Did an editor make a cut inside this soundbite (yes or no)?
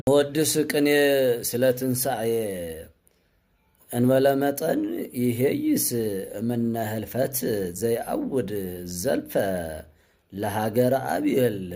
no